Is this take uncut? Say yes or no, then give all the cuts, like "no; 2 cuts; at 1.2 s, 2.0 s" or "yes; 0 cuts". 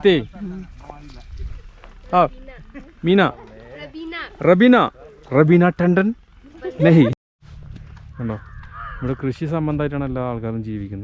no; 1 cut; at 7.2 s